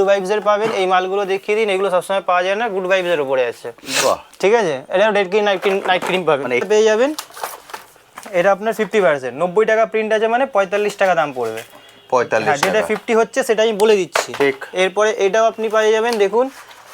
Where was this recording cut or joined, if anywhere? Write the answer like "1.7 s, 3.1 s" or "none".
6.6 s

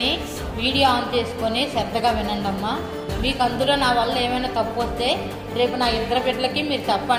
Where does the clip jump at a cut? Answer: none

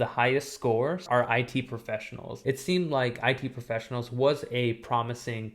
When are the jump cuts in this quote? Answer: 1.1 s, 2.3 s

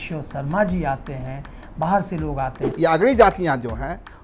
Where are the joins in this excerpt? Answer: 2.6 s

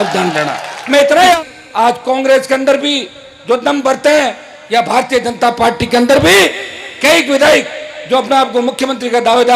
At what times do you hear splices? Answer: 1.4 s

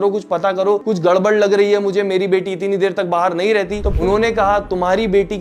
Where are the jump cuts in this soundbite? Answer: 3.9 s

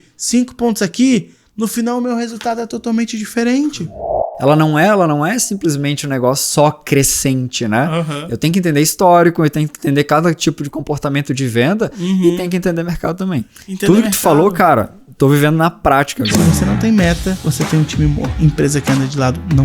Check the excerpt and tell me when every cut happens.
4.3 s, 16.3 s, 17.4 s, 18.3 s

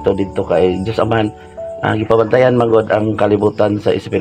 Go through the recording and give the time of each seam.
none

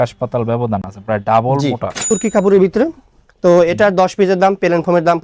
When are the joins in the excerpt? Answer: 2.1 s

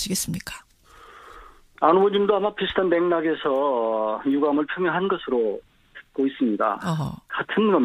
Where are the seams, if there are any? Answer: 3.4 s

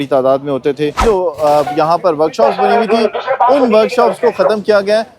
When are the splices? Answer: 1.0 s

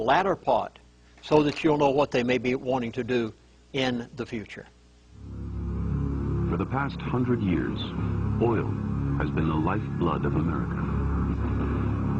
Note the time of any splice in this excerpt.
none

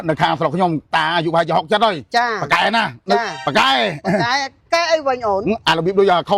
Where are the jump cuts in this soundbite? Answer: 0.9 s, 3.4 s

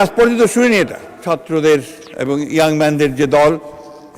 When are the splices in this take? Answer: 1.1 s

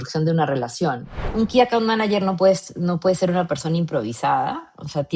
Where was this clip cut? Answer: 1.2 s

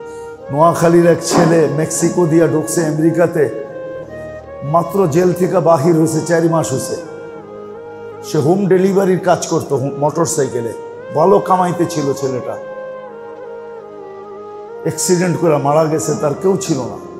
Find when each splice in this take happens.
12.9 s, 14.5 s

